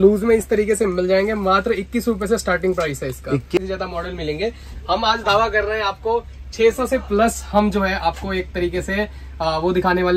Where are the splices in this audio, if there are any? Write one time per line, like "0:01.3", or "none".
0:03.6